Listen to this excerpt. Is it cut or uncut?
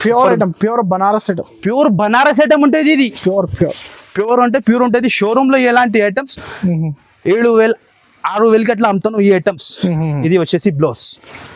uncut